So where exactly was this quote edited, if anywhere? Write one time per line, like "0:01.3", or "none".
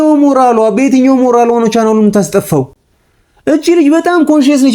none